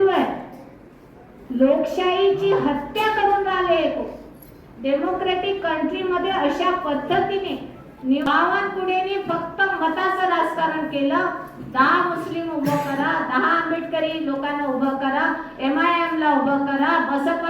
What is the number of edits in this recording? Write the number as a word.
one